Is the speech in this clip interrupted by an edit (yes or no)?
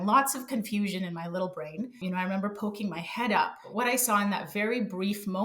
yes